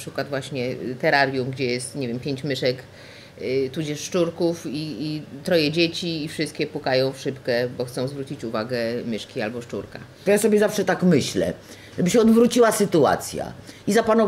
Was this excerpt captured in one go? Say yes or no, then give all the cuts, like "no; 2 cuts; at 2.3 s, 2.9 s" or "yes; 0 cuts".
no; 1 cut; at 10.2 s